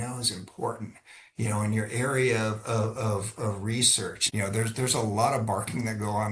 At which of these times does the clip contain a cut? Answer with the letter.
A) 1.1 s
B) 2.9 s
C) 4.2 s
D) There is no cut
C